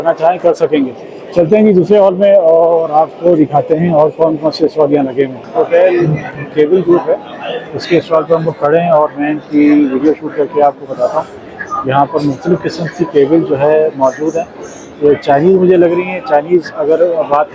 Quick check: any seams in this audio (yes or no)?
no